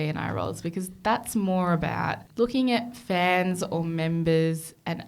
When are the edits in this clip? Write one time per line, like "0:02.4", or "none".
0:02.2